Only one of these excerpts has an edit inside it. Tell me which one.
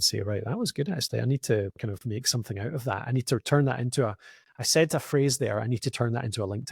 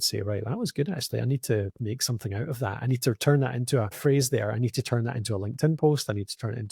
second; 2 cuts; at 1.7 s, 4.0 s

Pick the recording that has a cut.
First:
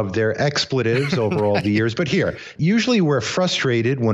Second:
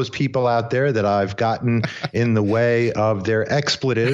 first; 1 cut; at 2.5 s

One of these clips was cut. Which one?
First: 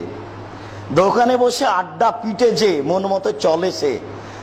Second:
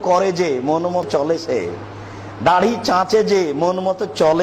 second; 1 cut; at 1.1 s

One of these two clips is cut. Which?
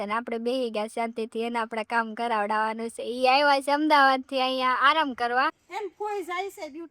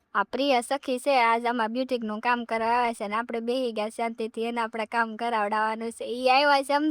first; 1 cut; at 5.6 s

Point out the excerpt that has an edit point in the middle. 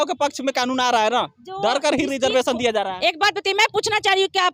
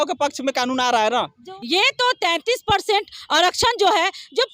second; 1 cut; at 1.4 s

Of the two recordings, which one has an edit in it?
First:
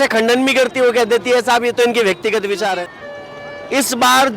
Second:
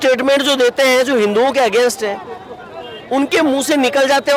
first; 1 cut; at 2.9 s

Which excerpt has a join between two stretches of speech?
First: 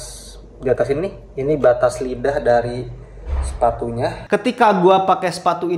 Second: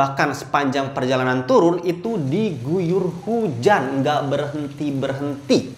first; 1 cut; at 4.2 s

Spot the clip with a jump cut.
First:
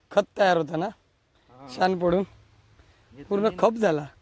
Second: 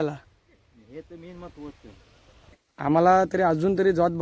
second; 1 cut; at 2.7 s

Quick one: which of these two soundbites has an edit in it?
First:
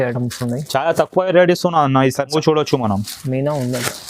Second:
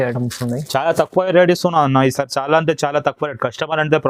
first; 1 cut; at 2.3 s

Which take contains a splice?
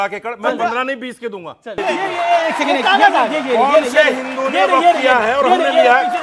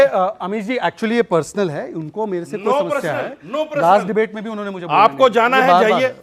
first; 1 cut; at 1.8 s

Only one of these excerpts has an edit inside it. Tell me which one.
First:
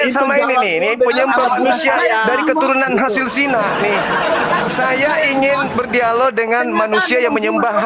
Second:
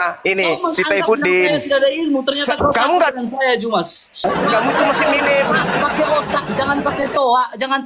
second; 1 cut; at 4.2 s

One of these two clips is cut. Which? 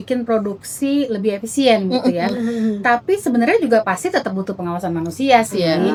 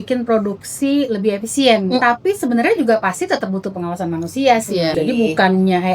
second; 2 cuts; at 2.0 s, 4.9 s

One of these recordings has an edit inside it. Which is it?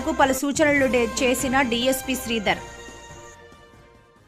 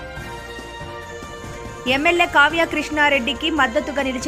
second; 1 cut; at 1.7 s

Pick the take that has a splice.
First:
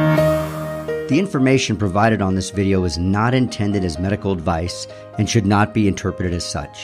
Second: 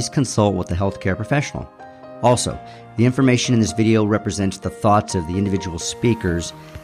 first; 1 cut; at 1.0 s

